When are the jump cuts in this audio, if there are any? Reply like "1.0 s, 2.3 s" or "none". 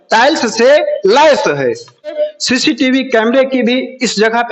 2.2 s

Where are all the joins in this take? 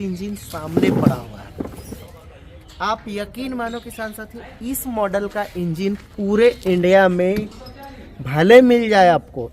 2.1 s

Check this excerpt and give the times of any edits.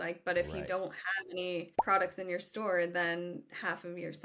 1.7 s

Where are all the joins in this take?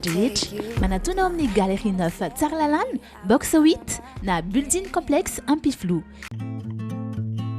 none

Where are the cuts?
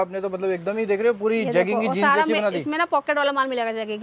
none

